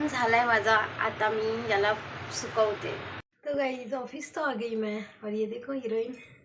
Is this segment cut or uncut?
cut